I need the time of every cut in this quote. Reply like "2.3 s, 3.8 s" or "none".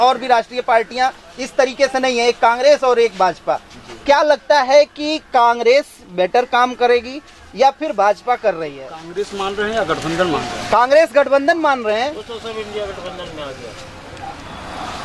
8.9 s

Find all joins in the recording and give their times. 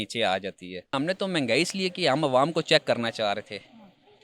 1.0 s

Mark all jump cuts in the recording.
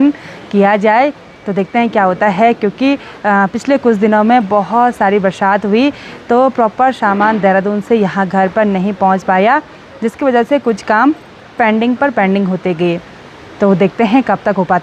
none

